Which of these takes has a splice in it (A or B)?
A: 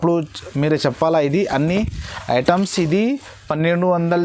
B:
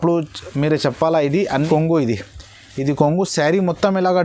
B